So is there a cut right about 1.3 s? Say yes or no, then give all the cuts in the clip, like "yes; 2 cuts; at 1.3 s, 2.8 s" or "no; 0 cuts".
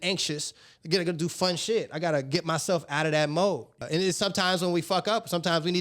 no; 1 cut; at 3.8 s